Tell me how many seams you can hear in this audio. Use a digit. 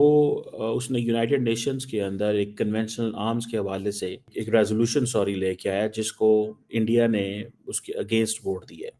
1